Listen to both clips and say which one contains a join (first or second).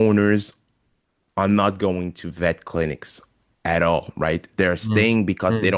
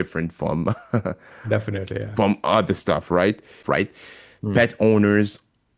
second